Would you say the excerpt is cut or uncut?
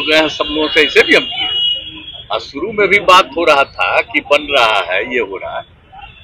uncut